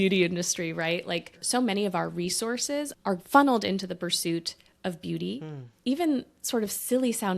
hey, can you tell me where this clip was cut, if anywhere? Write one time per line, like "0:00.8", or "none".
0:01.4
0:03.0
0:05.6